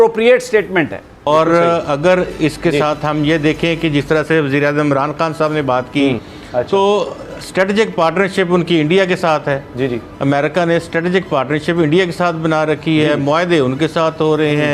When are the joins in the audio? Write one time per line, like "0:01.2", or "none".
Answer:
0:01.3
0:06.3